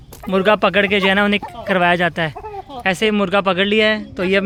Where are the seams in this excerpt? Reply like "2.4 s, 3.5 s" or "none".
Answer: none